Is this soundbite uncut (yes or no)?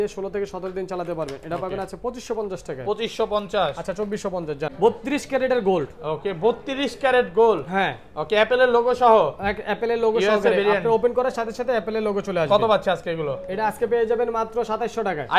no